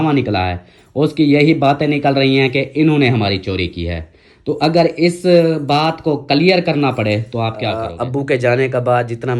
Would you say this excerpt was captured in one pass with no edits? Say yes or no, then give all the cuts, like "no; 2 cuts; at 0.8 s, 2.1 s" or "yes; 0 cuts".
no; 1 cut; at 7.8 s